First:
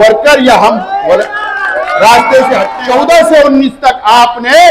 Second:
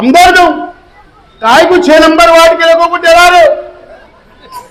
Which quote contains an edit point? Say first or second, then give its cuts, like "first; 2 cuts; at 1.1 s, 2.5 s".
first; 1 cut; at 2.8 s